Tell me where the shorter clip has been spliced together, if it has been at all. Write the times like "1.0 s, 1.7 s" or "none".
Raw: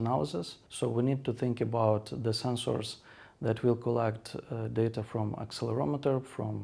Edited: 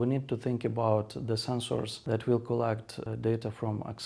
1.9 s, 3.0 s